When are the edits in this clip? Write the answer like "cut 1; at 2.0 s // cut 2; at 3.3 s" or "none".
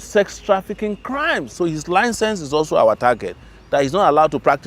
cut 1; at 1.5 s